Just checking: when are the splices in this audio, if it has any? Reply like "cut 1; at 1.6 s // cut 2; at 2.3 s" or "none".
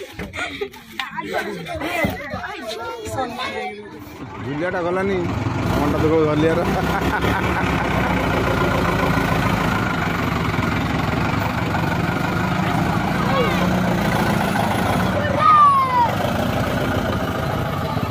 cut 1; at 4.3 s